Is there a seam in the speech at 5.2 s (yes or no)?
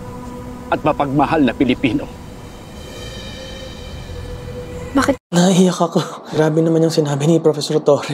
yes